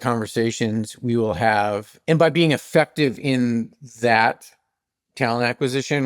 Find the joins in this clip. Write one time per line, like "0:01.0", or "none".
0:01.9